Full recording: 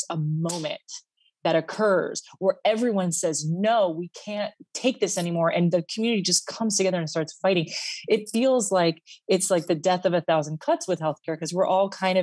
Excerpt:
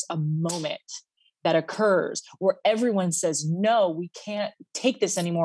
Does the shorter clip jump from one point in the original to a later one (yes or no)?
no